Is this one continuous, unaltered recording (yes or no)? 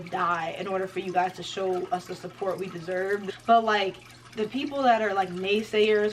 no